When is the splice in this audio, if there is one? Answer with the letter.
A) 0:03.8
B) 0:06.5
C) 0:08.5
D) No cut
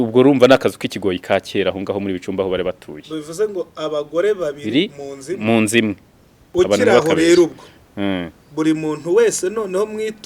B